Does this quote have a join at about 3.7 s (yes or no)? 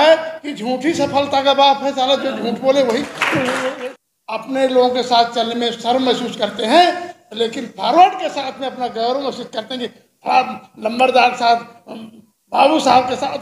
yes